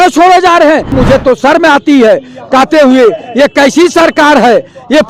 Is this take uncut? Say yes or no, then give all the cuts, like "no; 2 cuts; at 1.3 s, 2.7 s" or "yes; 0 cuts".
no; 1 cut; at 1.0 s